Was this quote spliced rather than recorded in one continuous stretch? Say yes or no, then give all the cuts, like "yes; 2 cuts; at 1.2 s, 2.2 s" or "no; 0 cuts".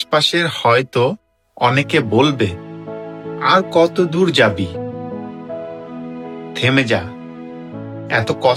no; 0 cuts